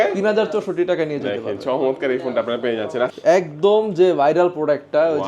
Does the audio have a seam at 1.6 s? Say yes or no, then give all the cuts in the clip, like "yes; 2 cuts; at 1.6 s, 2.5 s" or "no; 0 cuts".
no; 1 cut; at 3.1 s